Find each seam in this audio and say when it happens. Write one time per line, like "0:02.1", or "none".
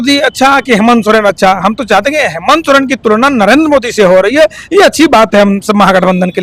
none